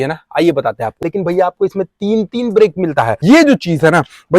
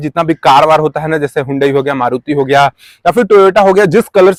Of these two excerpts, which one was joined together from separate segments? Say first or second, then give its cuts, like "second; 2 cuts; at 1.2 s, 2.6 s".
first; 2 cuts; at 1.1 s, 3.1 s